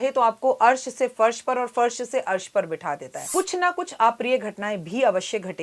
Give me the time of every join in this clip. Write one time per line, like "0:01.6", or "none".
0:03.1